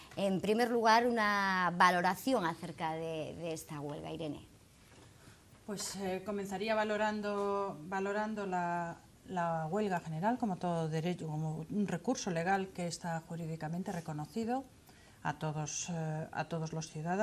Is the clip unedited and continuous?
yes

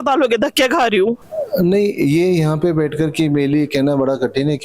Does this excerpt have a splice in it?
yes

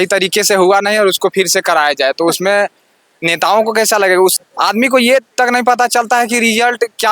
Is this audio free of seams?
no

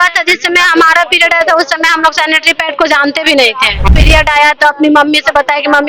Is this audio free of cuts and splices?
no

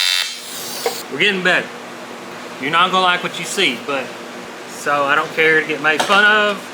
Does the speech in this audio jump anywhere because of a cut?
yes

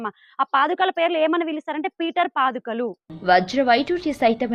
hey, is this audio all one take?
yes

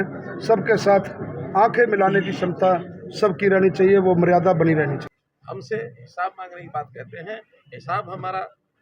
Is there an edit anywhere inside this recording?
yes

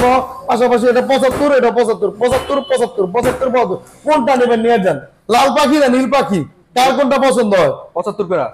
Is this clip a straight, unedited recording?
yes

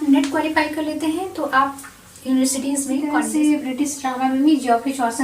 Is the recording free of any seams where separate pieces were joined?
no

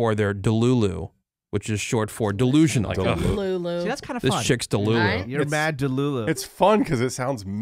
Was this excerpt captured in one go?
no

